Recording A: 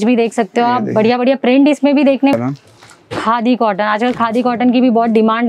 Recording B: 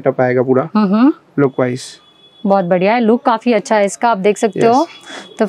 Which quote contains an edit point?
A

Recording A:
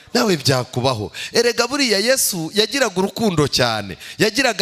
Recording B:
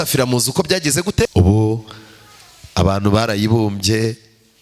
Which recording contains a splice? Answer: B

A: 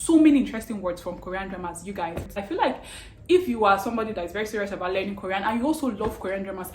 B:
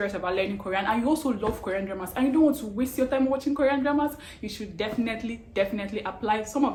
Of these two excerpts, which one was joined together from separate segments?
A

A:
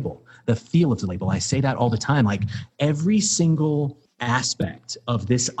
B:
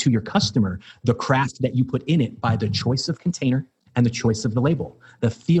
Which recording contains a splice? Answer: A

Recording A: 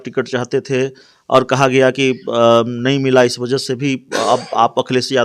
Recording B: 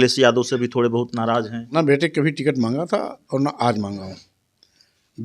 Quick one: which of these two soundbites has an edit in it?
B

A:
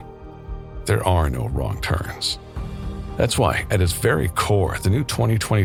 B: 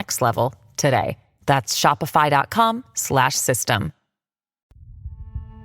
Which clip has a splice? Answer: B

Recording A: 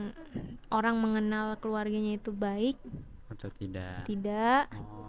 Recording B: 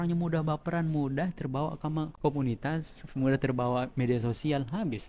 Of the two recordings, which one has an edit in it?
B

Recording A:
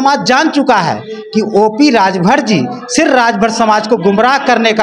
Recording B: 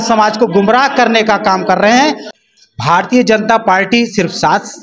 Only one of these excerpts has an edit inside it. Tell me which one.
B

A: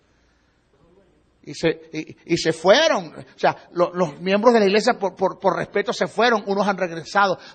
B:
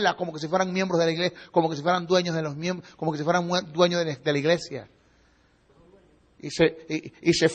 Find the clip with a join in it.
A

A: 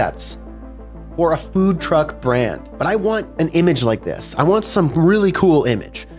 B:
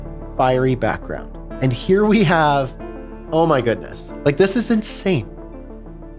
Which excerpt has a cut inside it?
A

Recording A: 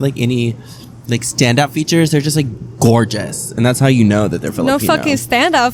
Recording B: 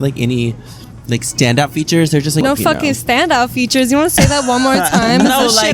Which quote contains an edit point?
B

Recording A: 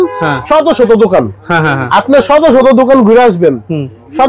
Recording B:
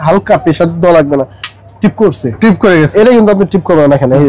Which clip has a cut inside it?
B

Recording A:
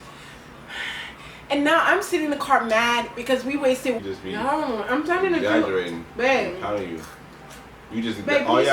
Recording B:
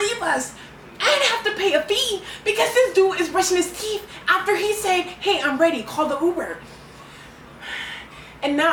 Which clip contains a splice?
A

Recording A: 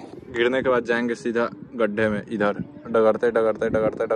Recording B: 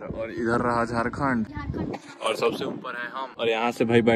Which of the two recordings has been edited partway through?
B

